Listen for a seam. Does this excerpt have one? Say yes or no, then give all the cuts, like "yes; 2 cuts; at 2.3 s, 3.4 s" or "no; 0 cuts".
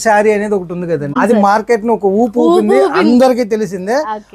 yes; 1 cut; at 1.1 s